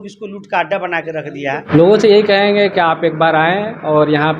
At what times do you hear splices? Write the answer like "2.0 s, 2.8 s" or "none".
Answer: 1.6 s